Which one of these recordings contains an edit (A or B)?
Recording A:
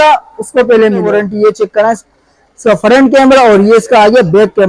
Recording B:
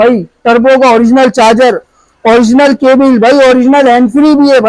A